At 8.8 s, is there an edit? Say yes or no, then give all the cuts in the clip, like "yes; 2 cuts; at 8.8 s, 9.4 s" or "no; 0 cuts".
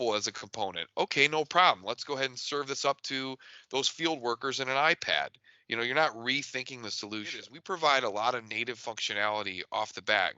no; 1 cut; at 7.5 s